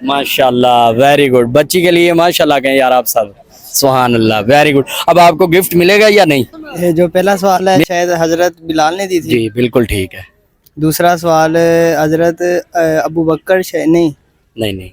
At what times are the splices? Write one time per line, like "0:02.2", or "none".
0:06.6

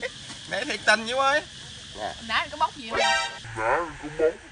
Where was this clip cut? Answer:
0:03.2

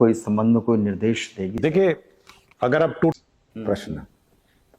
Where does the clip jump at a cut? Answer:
0:03.1

